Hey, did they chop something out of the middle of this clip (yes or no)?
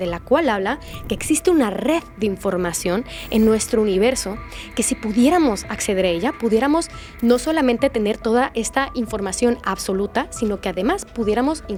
no